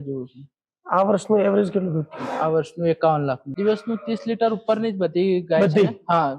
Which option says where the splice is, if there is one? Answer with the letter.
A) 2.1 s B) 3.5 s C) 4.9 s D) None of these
B